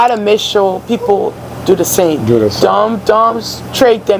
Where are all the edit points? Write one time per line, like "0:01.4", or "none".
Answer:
none